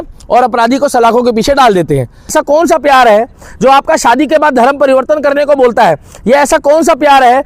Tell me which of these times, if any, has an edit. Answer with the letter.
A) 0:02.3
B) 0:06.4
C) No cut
A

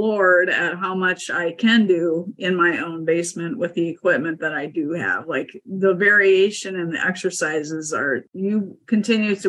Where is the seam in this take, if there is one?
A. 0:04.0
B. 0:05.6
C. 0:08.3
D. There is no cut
C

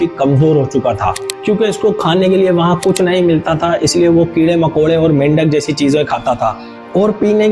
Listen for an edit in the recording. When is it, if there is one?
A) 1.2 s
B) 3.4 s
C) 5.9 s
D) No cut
A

